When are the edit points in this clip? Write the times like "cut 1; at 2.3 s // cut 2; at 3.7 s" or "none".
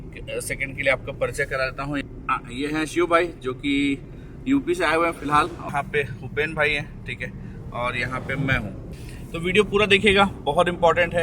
cut 1; at 2.0 s // cut 2; at 5.6 s // cut 3; at 8.9 s